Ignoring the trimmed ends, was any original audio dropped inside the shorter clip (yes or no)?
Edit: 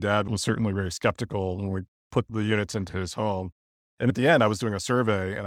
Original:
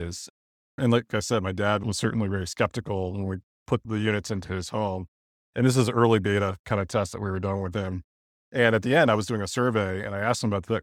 yes